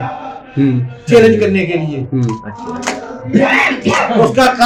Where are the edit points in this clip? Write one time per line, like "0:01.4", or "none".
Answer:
none